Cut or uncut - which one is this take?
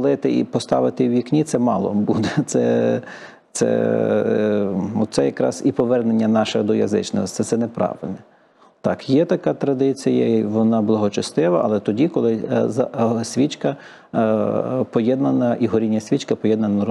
uncut